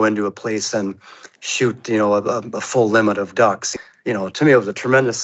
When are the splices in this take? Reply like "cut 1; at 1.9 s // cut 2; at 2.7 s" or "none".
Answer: cut 1; at 3.7 s